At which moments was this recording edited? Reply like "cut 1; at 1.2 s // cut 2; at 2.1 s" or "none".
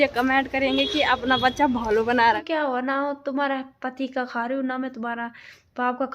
cut 1; at 2.4 s